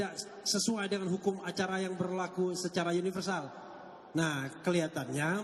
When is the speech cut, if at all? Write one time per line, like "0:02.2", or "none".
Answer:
none